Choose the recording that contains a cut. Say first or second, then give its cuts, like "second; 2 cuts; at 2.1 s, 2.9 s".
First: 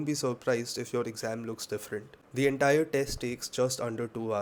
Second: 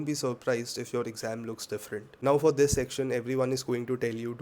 second; 1 cut; at 2.1 s